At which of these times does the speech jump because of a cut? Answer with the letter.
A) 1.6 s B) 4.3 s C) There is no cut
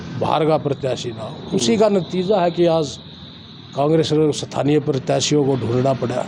C